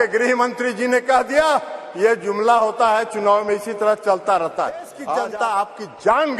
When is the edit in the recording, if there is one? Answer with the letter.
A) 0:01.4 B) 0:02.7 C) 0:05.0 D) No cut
C